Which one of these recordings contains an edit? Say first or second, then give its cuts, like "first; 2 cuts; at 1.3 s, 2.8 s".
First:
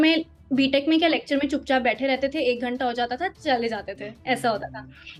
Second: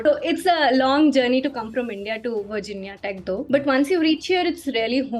second; 1 cut; at 3.4 s